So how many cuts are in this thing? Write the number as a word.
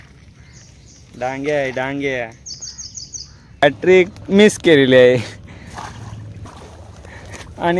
one